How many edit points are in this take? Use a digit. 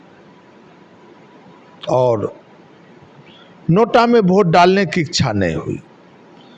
0